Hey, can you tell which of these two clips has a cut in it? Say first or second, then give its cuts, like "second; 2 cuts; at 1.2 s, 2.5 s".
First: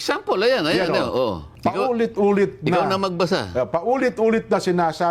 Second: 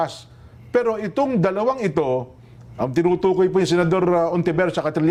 first; 1 cut; at 1.5 s